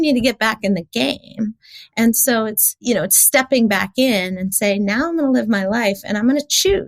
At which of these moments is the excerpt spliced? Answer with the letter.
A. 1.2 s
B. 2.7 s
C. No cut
B